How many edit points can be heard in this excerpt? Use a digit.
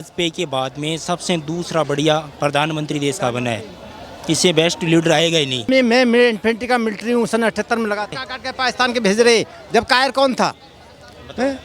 2